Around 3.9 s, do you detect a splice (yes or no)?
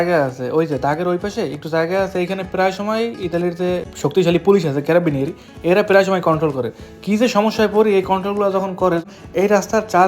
yes